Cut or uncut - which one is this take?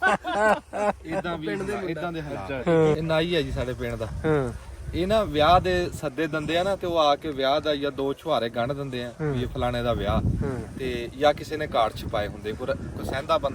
cut